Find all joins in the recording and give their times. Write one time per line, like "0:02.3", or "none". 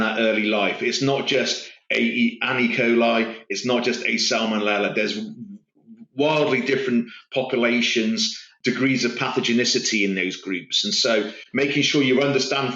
0:08.5